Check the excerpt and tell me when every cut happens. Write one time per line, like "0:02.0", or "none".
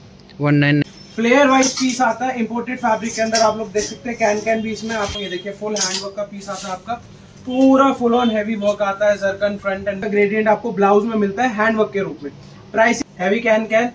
0:00.8
0:05.1
0:10.0
0:13.0